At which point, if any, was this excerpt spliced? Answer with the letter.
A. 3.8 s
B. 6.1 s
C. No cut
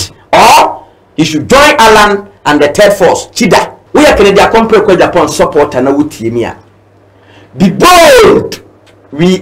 A